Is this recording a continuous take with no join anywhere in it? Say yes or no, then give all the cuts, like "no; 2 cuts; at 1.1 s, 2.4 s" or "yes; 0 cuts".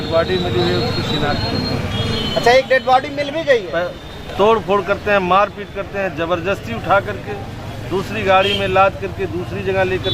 no; 1 cut; at 3.7 s